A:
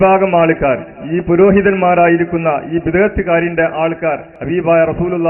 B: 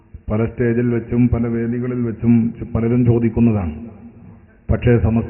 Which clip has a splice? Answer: A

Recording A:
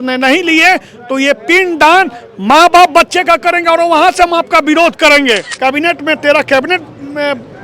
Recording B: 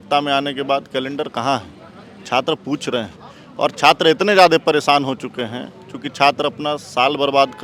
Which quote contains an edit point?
A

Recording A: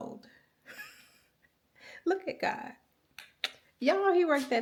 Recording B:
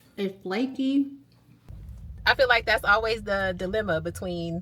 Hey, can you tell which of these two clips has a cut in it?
B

